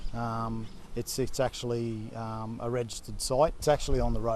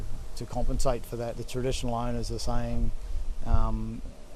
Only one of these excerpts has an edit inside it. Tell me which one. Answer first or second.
second